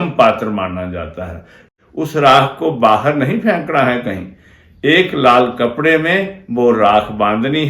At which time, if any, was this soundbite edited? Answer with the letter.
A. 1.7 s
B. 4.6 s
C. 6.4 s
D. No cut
A